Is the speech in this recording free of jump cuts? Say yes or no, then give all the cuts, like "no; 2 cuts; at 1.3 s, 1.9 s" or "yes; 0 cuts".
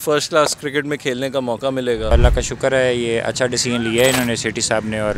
no; 1 cut; at 2.1 s